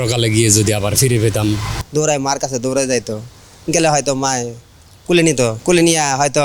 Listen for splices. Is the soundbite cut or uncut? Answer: cut